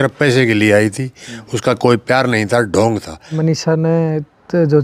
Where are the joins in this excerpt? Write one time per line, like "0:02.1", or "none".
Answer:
0:03.3